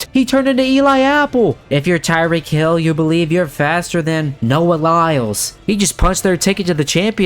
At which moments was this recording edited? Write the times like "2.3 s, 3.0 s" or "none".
1.6 s, 5.5 s